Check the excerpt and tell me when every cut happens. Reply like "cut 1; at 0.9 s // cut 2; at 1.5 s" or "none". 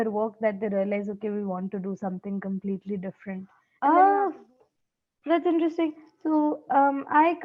cut 1; at 3.6 s

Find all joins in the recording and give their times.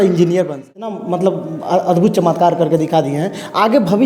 cut 1; at 1.0 s

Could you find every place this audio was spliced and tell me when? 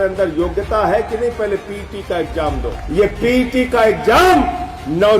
cut 1; at 2.7 s

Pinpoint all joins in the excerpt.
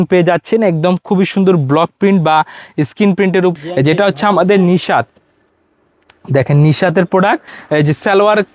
cut 1; at 3.5 s // cut 2; at 7.5 s

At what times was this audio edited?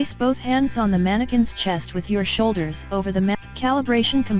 cut 1; at 3.4 s

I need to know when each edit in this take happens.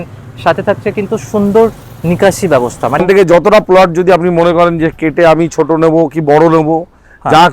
cut 1; at 3.0 s

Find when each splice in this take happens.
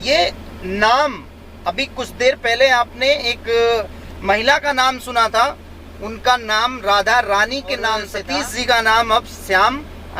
cut 1; at 8.2 s

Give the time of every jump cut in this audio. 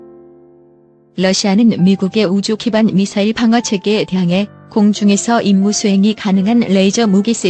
cut 1; at 1.1 s

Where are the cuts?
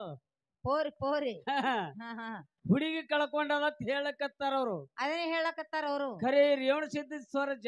none

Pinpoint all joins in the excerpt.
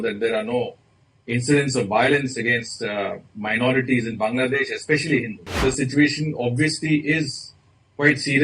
cut 1; at 5.6 s

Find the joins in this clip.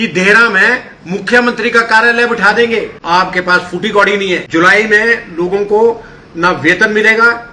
cut 1; at 3.0 s // cut 2; at 4.4 s

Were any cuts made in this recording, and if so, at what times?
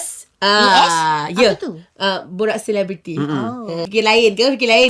cut 1; at 3.9 s

